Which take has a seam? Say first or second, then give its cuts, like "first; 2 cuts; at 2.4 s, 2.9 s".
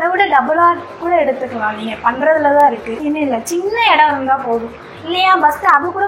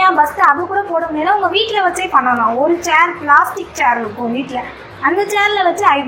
first; 1 cut; at 3.0 s